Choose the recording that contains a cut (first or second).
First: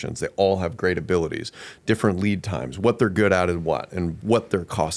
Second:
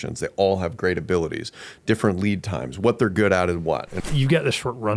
second